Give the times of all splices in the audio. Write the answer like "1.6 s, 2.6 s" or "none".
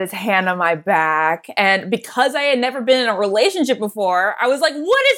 none